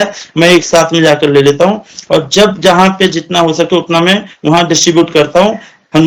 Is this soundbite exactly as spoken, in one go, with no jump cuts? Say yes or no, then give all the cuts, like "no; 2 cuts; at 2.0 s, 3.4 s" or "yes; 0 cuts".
yes; 0 cuts